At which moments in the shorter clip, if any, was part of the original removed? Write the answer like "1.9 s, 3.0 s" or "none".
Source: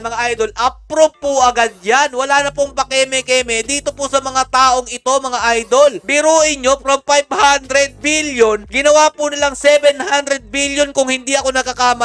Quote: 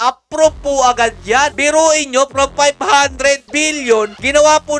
1.5 s